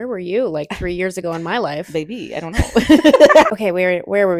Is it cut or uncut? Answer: uncut